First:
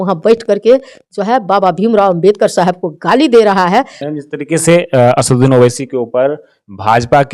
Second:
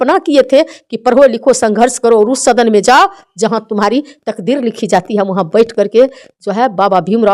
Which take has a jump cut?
first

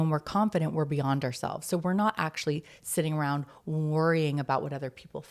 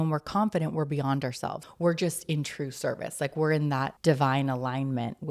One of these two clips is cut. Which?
second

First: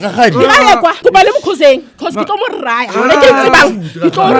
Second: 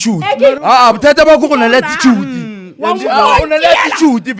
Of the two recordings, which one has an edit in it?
first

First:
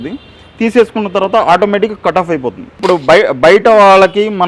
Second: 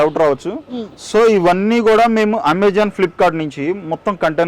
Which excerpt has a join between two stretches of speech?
first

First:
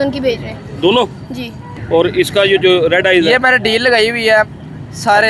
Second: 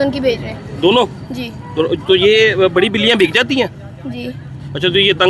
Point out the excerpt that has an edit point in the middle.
first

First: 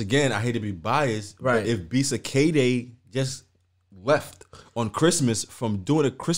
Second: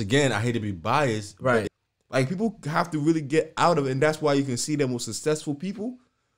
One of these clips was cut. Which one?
second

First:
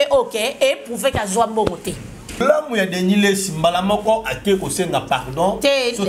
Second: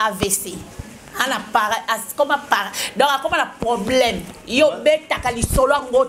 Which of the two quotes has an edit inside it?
first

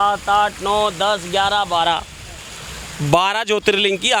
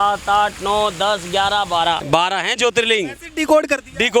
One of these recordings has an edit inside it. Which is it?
second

